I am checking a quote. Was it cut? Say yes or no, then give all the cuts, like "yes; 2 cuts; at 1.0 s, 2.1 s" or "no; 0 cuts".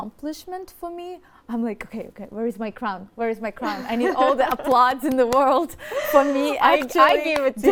no; 0 cuts